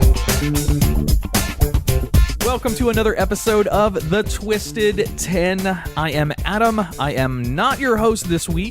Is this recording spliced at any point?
yes; 1 cut; at 2.8 s

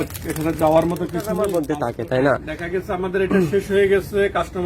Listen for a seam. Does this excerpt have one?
yes; 1 cut; at 1.4 s

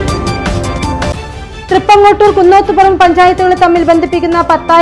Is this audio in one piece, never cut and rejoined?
no; 1 cut; at 1.1 s

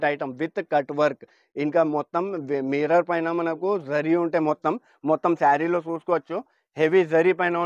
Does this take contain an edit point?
no; 0 cuts

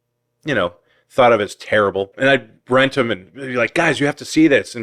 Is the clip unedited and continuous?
no; 1 cut; at 2.1 s

